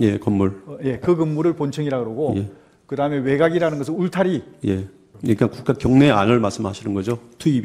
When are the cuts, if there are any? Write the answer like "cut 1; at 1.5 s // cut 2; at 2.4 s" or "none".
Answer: cut 1; at 5.0 s

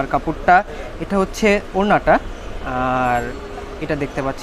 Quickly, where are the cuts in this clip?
none

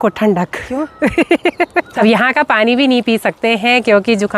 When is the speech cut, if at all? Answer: cut 1; at 1.9 s

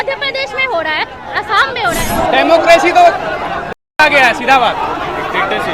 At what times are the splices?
cut 1; at 2.1 s

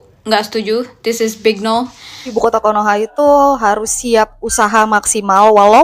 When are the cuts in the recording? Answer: cut 1; at 2.3 s

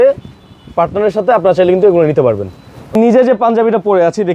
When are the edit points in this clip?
none

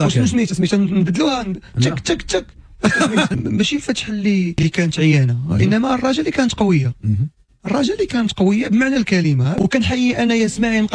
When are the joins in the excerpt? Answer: cut 1; at 3.3 s // cut 2; at 9.5 s

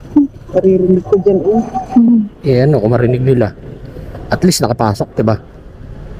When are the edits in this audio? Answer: none

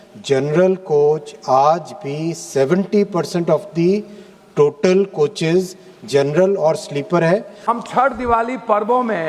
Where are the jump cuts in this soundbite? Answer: cut 1; at 7.6 s

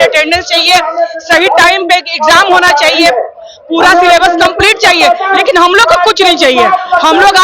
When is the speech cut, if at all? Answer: none

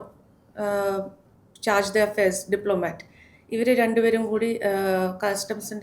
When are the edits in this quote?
none

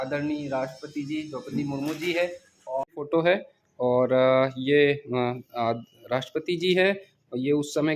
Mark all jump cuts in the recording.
cut 1; at 2.8 s

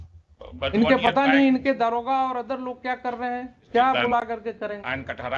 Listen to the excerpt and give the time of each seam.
cut 1; at 3.6 s

